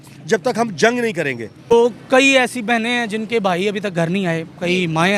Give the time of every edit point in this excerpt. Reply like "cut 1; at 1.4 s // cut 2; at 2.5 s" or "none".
cut 1; at 1.7 s

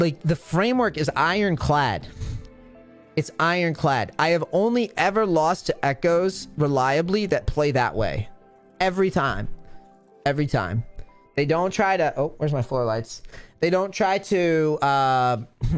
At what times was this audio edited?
none

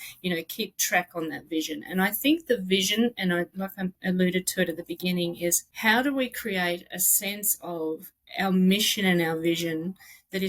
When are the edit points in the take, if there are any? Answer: cut 1; at 5.7 s

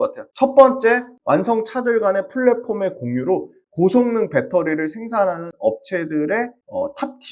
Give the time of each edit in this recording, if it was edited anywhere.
cut 1; at 1.1 s

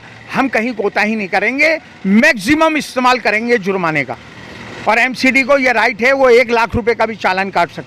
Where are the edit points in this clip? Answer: none

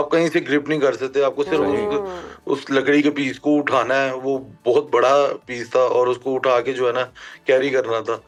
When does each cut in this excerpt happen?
none

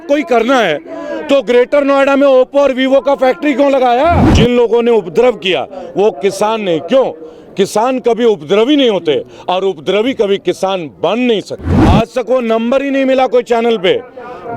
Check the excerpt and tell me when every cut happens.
cut 1; at 4.3 s // cut 2; at 11.7 s

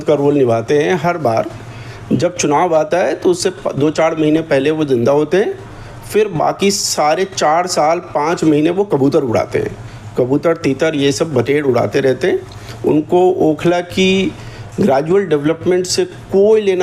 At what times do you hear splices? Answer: none

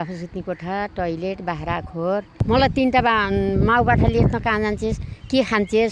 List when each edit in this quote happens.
cut 1; at 2.3 s

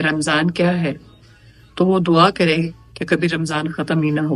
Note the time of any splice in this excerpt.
none

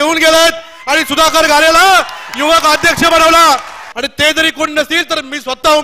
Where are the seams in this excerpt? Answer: cut 1; at 3.8 s

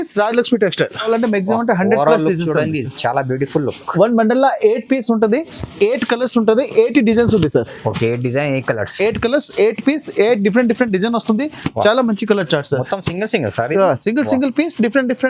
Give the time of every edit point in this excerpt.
cut 1; at 1.1 s

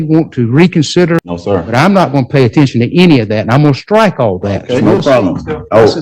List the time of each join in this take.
cut 1; at 1.3 s // cut 2; at 4.8 s

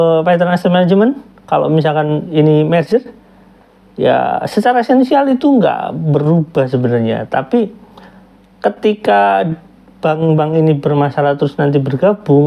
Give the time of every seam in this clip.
none

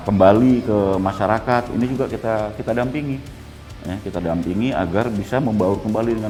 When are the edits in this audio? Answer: none

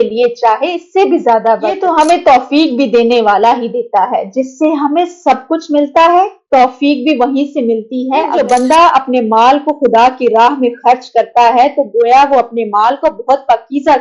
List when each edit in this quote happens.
cut 1; at 1.8 s // cut 2; at 8.3 s

